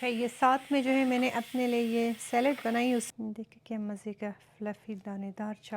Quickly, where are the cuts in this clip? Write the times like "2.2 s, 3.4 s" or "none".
3.1 s